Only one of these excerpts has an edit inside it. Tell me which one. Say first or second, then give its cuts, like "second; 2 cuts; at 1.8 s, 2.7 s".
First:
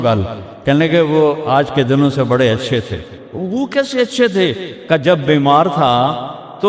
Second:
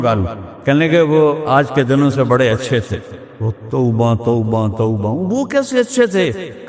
first; 1 cut; at 3.4 s